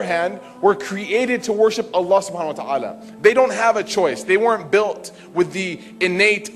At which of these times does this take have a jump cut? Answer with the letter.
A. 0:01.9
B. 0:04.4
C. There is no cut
C